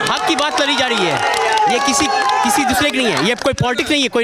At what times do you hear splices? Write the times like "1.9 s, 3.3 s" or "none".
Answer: none